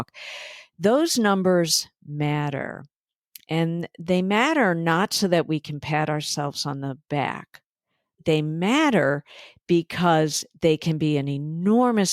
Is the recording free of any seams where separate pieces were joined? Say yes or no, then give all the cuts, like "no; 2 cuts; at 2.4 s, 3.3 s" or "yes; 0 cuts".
no; 1 cut; at 8.2 s